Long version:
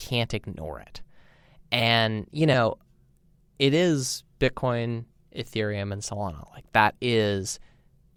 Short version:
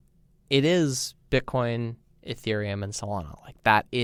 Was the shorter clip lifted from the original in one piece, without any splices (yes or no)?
yes